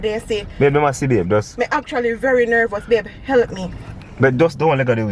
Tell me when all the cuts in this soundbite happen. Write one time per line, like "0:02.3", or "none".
none